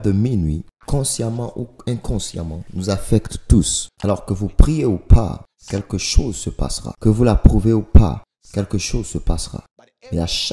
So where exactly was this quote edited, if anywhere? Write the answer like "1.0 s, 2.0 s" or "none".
3.8 s, 7.0 s